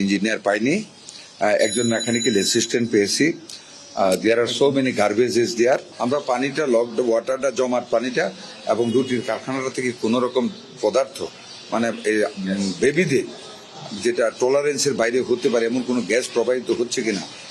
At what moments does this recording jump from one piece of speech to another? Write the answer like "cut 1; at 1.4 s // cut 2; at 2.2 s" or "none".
cut 1; at 5.9 s